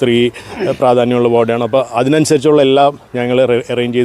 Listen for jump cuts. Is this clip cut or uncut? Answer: uncut